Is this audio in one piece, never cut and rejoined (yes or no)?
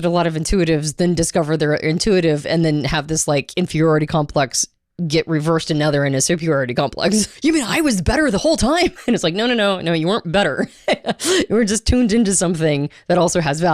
no